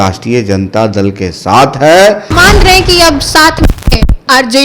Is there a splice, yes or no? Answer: yes